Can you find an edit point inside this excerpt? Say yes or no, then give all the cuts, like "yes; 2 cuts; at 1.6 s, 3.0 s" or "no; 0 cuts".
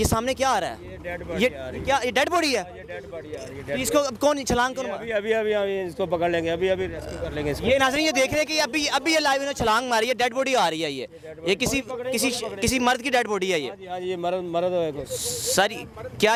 no; 0 cuts